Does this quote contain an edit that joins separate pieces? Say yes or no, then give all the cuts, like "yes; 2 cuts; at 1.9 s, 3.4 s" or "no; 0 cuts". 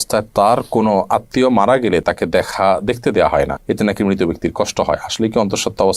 no; 0 cuts